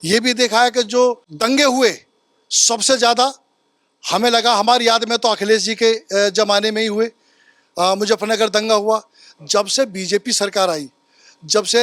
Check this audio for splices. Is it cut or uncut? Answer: cut